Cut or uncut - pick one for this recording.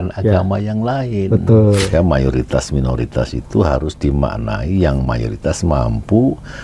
cut